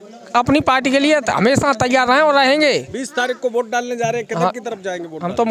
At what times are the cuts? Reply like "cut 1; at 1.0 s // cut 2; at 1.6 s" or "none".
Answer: none